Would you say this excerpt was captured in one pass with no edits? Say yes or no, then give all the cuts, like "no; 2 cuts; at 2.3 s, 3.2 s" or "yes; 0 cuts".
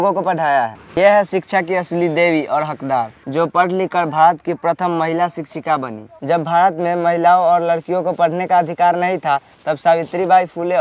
no; 1 cut; at 1.0 s